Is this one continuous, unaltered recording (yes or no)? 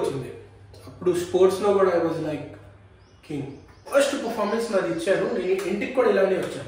no